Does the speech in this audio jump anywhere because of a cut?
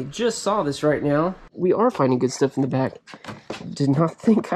yes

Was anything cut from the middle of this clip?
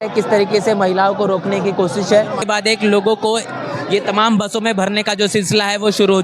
yes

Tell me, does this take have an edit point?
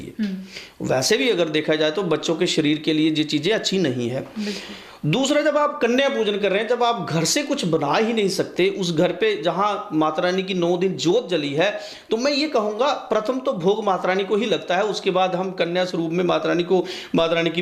no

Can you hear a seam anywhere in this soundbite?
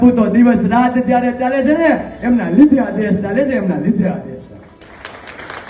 no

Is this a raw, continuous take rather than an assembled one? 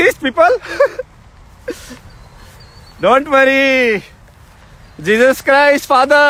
yes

